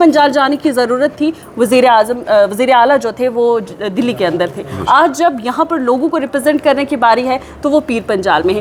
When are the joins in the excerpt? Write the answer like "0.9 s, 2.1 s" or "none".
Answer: none

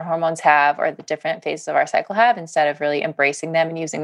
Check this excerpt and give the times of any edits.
none

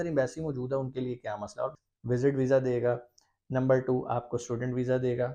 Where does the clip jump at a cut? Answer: 1.8 s

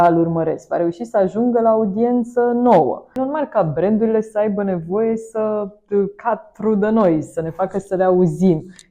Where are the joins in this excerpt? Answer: 3.1 s

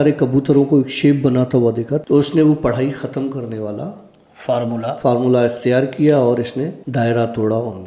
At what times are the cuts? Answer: 1.9 s, 6.8 s

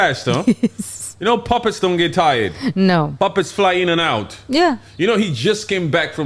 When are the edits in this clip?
3.1 s

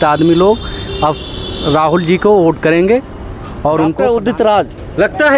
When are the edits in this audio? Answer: 4.0 s

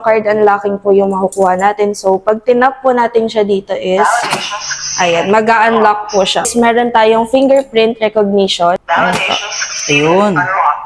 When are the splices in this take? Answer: 6.5 s, 8.8 s

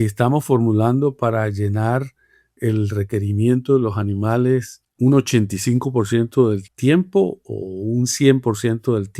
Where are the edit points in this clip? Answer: 4.8 s, 6.7 s

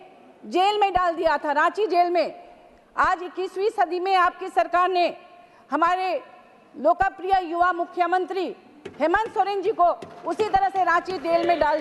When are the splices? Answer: none

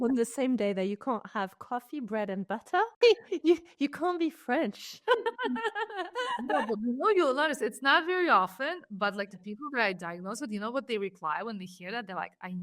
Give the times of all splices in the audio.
2.9 s

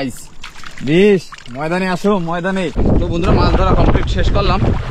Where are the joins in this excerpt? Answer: 2.8 s

